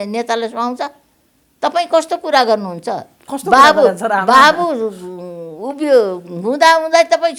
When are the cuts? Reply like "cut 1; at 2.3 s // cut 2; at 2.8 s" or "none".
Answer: none

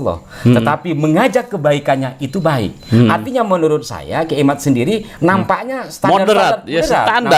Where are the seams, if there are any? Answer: none

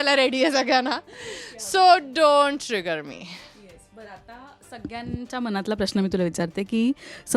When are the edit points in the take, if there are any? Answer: none

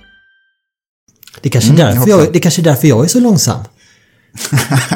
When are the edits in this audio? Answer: cut 1; at 1.0 s

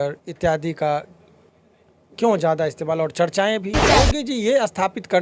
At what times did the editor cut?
cut 1; at 4.0 s

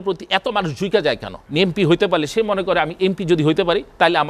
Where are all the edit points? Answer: cut 1; at 1.3 s

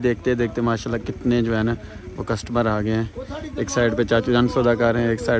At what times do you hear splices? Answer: none

